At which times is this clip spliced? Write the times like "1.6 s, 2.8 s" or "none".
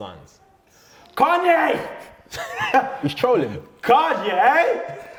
none